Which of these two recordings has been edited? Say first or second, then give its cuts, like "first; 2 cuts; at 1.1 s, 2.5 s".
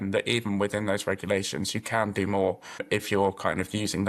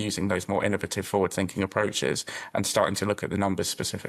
first; 1 cut; at 2.8 s